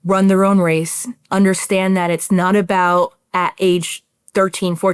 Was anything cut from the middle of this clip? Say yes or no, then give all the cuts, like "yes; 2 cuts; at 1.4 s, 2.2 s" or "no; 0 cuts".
no; 0 cuts